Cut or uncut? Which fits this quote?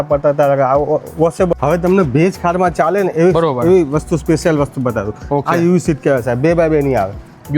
cut